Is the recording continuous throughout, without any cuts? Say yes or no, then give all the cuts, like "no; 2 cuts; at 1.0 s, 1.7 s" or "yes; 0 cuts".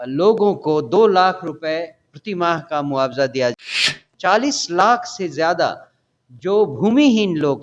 no; 1 cut; at 3.6 s